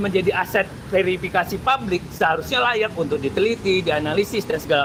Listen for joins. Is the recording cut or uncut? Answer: uncut